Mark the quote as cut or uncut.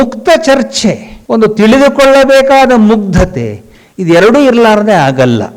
cut